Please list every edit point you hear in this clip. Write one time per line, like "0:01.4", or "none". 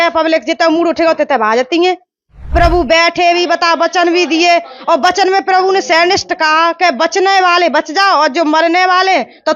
0:02.5